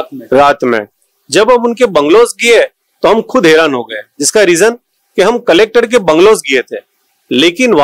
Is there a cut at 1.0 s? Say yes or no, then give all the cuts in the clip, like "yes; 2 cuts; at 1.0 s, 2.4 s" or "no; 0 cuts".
no; 0 cuts